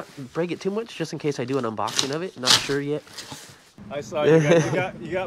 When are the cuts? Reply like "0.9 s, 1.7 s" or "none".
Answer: 3.7 s